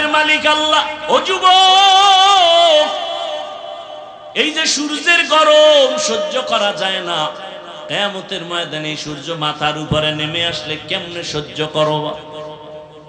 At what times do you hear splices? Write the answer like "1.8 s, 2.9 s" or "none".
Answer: 4.1 s